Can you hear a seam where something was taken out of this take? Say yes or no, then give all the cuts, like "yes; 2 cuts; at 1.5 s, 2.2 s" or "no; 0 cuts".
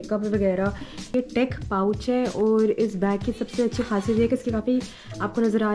yes; 1 cut; at 1.1 s